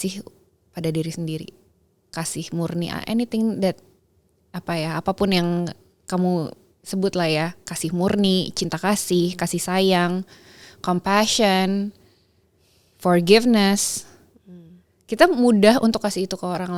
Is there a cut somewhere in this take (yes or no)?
no